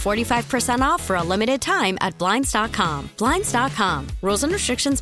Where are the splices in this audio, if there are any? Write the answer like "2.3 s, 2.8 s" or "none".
none